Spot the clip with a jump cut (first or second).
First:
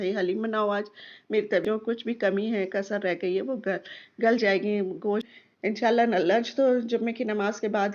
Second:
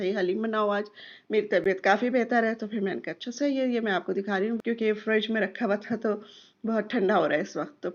first